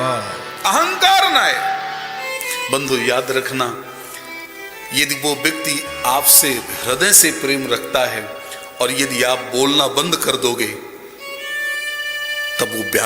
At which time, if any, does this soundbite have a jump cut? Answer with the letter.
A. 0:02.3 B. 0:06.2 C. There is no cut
A